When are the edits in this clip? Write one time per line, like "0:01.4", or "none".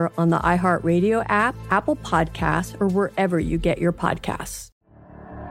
0:01.5